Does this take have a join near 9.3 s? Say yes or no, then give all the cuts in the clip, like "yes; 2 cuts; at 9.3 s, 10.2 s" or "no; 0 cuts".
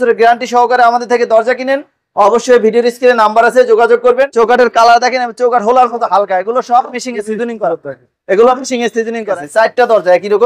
yes; 2 cuts; at 4.3 s, 9.3 s